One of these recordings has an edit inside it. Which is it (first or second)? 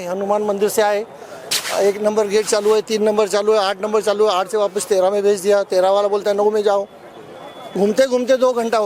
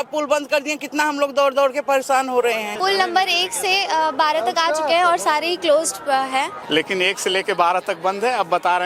second